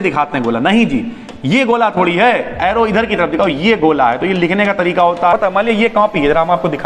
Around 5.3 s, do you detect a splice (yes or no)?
yes